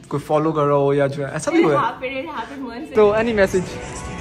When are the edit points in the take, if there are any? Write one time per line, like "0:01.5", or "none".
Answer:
0:02.8